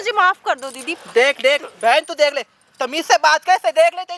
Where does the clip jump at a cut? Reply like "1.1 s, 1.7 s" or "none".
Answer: none